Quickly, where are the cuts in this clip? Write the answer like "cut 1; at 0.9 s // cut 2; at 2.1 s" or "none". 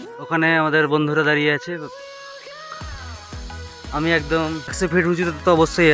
cut 1; at 4.9 s